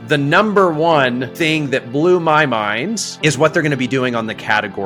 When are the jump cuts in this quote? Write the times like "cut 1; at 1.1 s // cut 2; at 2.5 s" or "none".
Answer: cut 1; at 3.1 s